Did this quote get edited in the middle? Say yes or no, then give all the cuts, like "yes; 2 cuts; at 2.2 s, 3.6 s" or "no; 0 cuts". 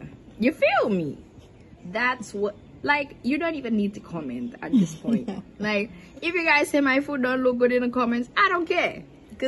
no; 0 cuts